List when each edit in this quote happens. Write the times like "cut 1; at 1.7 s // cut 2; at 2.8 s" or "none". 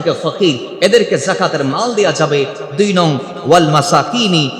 none

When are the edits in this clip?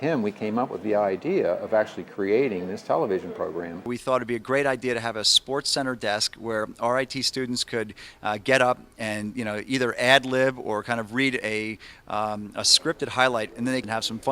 cut 1; at 3.4 s

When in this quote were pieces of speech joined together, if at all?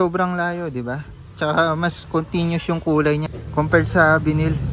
cut 1; at 3.4 s

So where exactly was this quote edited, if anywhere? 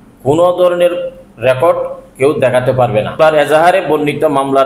cut 1; at 3.2 s

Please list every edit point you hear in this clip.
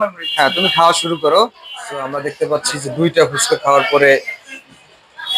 cut 1; at 2.2 s

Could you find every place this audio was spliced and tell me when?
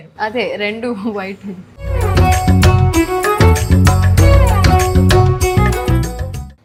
none

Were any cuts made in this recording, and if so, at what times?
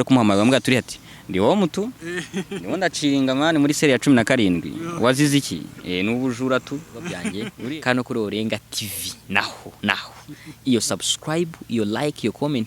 cut 1; at 7.5 s

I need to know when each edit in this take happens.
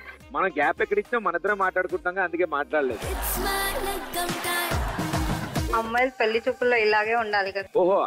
cut 1; at 5.8 s

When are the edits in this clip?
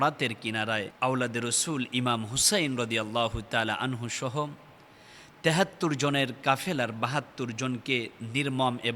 cut 1; at 0.9 s

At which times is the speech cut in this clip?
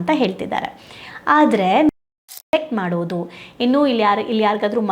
cut 1; at 2.2 s

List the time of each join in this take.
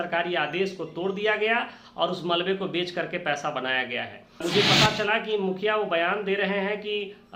cut 1; at 4.4 s

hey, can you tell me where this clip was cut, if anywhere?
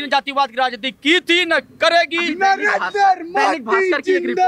none

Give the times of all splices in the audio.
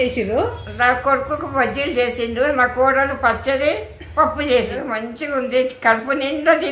cut 1; at 4.8 s

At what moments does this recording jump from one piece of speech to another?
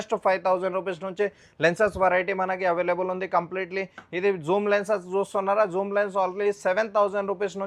none

